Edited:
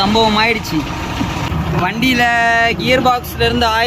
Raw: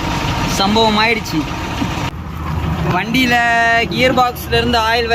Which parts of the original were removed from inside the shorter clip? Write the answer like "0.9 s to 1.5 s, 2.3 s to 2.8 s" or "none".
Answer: 2.1 s to 2.6 s